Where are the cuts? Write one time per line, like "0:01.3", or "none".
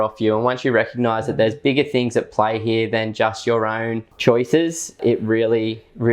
0:04.1
0:05.0